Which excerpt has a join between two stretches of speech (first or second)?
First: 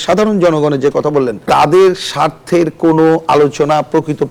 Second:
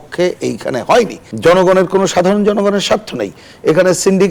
second